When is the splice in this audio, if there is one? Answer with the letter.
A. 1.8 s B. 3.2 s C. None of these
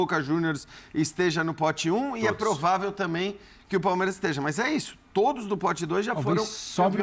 C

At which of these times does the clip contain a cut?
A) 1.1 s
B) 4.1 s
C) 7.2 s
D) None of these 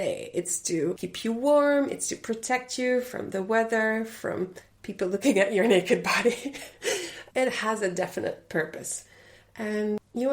A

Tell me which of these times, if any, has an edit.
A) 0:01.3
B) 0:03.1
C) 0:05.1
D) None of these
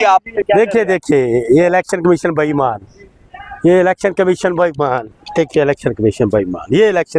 D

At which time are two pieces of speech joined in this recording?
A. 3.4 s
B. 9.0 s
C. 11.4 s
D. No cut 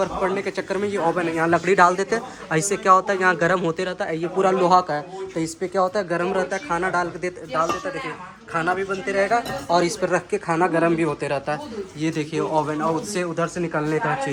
D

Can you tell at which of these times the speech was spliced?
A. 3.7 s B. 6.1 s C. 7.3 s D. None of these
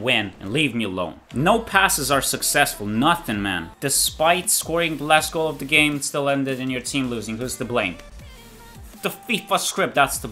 A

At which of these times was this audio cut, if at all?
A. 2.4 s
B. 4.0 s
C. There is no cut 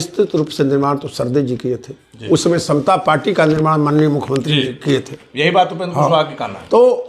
C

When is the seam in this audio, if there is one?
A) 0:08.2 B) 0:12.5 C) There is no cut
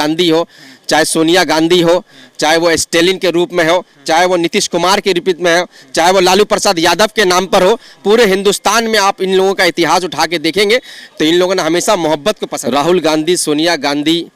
B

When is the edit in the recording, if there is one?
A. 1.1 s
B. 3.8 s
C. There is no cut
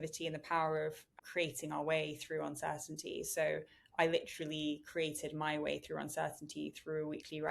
A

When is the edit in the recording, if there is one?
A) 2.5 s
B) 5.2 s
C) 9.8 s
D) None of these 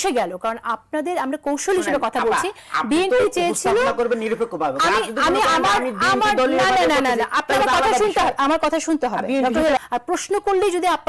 C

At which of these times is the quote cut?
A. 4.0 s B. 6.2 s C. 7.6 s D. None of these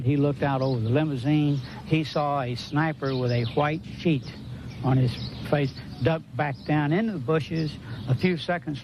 A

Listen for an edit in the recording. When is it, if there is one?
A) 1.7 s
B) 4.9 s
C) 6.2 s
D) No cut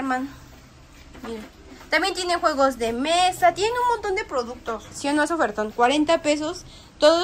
B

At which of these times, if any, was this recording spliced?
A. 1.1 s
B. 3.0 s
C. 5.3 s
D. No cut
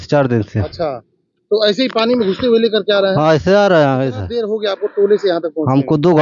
D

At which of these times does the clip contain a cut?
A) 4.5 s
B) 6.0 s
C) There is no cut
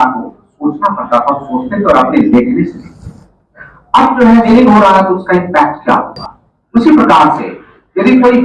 A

